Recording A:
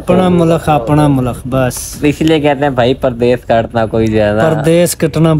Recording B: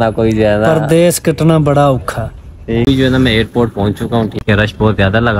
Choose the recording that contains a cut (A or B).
B